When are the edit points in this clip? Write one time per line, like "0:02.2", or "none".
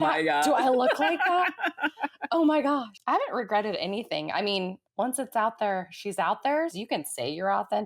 0:02.9
0:04.8
0:06.8